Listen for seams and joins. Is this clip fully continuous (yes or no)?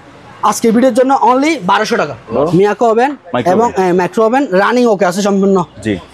no